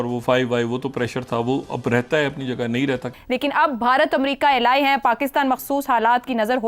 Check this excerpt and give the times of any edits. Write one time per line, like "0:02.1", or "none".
0:03.1